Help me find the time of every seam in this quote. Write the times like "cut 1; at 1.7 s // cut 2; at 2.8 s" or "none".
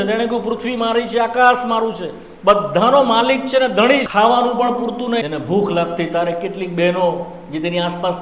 cut 1; at 4.1 s // cut 2; at 5.2 s

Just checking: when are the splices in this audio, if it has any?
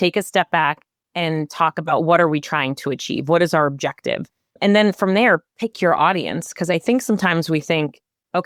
none

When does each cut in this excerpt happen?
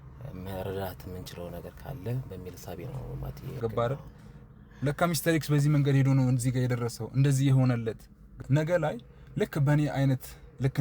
cut 1; at 3.6 s // cut 2; at 8.4 s

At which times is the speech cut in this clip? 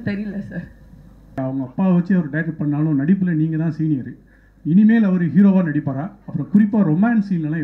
cut 1; at 1.4 s

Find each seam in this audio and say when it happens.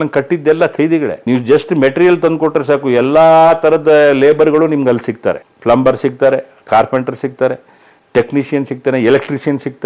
none

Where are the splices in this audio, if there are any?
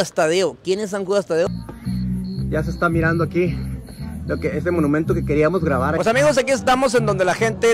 cut 1; at 1.5 s // cut 2; at 5.9 s

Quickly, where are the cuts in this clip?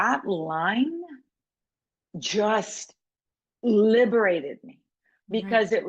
none

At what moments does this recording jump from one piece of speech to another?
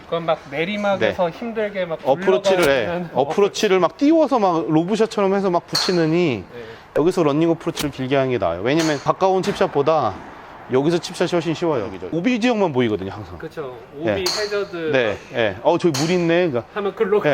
cut 1; at 12.0 s

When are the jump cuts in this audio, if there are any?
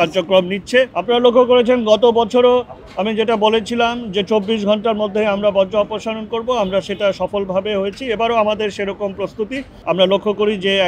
cut 1; at 0.9 s // cut 2; at 9.7 s

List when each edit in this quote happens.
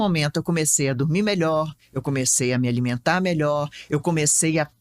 none

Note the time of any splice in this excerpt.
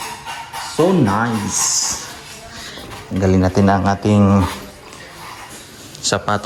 none

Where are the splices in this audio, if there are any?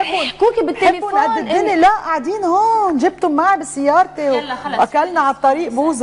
cut 1; at 4.3 s

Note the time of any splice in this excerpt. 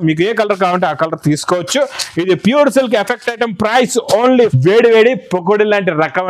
cut 1; at 4.6 s

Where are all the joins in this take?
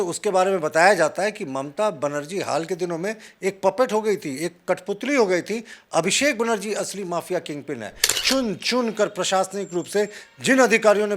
cut 1; at 8.2 s

